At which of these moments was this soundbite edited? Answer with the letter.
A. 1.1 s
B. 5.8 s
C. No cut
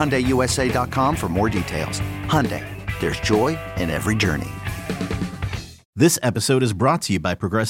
B